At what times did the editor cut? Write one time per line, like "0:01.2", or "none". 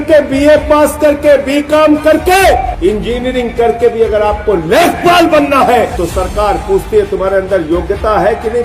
0:02.7
0:05.9